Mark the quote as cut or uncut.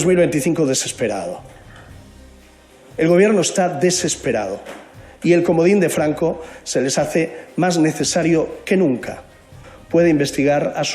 cut